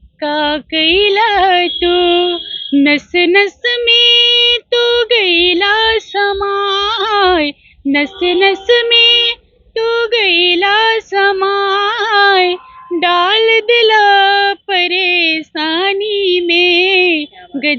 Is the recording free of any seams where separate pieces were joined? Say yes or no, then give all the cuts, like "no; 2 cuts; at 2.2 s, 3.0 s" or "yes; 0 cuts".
yes; 0 cuts